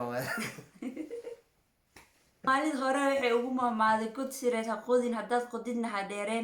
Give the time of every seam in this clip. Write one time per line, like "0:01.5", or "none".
0:02.5